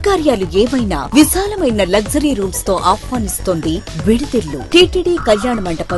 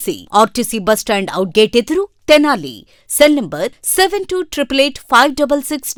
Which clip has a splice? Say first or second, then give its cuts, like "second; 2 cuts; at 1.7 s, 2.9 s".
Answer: first; 1 cut; at 4.6 s